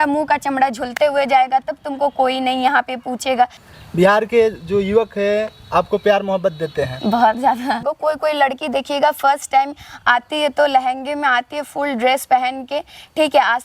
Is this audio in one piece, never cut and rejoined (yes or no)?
no